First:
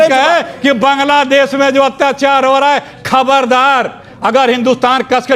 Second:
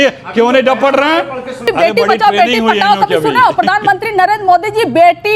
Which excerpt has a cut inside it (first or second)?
second